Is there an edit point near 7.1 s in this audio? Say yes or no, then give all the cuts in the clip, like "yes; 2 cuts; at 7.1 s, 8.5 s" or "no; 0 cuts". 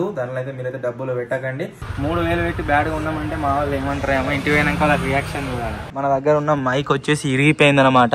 no; 2 cuts; at 1.8 s, 5.8 s